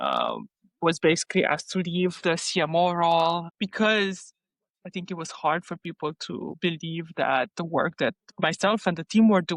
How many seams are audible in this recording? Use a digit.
2